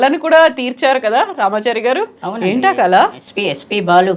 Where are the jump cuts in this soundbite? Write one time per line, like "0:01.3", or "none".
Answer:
none